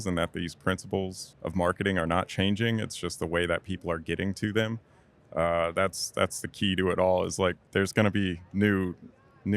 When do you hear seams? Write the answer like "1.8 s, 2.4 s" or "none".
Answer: 1.3 s, 7.6 s